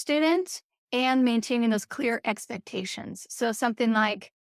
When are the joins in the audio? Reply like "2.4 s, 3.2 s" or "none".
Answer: none